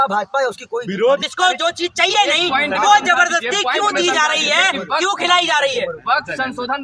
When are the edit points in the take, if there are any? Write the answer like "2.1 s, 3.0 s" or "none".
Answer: none